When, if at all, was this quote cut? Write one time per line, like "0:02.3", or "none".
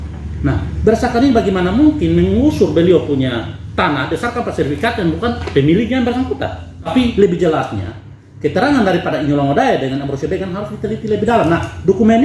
0:06.9

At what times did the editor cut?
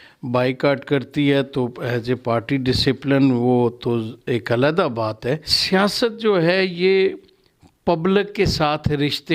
0:05.5

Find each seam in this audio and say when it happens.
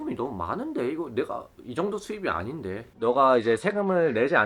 0:02.9

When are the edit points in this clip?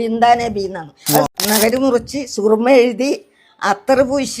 0:01.3

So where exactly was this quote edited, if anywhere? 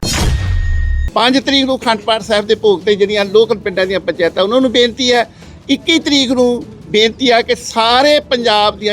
0:00.9

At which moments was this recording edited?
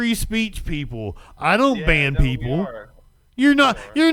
none

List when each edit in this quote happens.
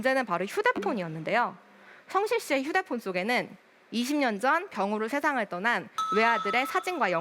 none

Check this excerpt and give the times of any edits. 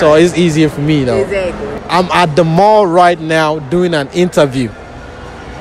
0:01.8

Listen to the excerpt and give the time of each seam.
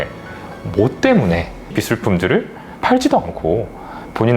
0:01.8

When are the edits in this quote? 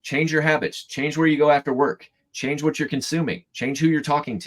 0:03.5

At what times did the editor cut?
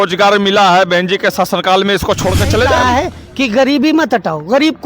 0:02.8

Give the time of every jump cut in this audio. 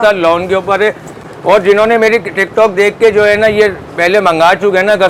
none

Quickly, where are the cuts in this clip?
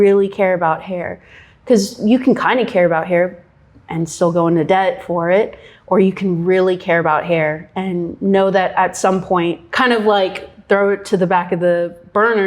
none

